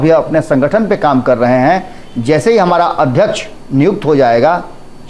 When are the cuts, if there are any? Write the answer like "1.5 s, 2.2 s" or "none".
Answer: none